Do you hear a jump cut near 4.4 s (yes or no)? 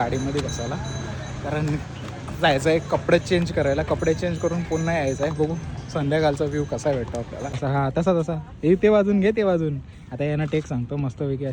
no